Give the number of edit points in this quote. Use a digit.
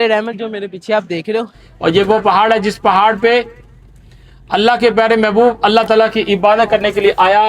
1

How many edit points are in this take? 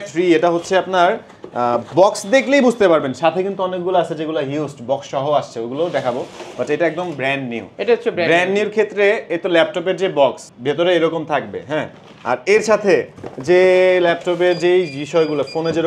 0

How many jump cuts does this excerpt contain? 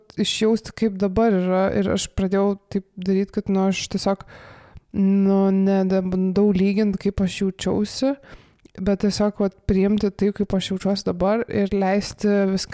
1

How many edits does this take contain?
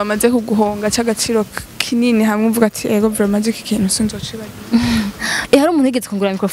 1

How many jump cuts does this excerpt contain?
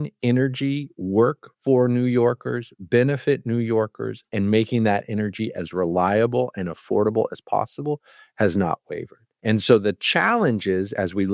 0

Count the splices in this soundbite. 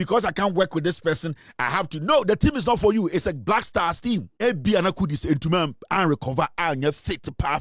1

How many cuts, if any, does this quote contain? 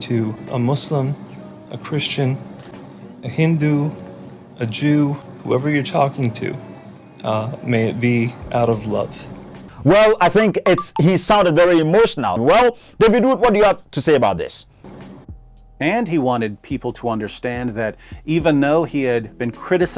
1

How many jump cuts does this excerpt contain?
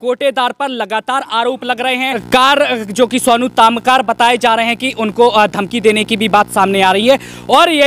1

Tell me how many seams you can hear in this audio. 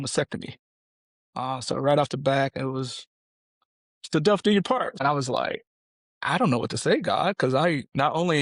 1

